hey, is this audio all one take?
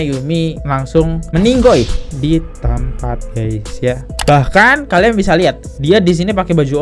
no; 1 cut; at 4.1 s

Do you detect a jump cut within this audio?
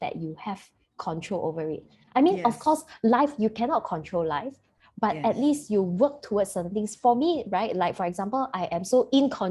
no; 0 cuts

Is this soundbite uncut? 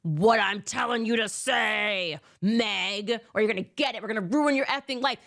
no; 1 cut; at 3.5 s

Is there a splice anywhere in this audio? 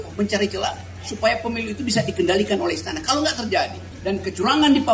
yes; 1 cut; at 3.9 s

